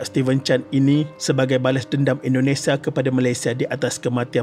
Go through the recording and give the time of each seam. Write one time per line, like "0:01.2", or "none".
none